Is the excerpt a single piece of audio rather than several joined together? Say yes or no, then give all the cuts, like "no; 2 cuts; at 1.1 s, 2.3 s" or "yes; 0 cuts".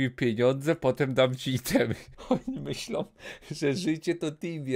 no; 1 cut; at 2.1 s